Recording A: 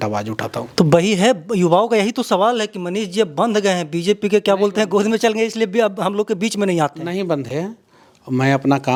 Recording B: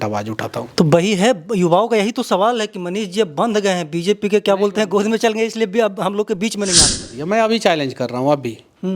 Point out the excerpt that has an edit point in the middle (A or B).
B